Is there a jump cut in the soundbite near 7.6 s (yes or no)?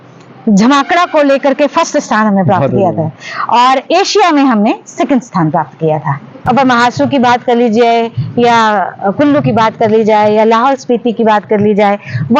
no